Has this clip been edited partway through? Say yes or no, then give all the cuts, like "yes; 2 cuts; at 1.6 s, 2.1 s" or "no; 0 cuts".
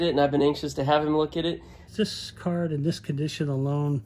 yes; 1 cut; at 1.8 s